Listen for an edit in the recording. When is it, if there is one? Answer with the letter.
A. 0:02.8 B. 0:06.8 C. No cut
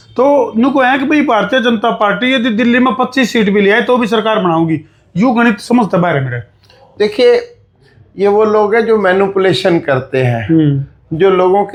C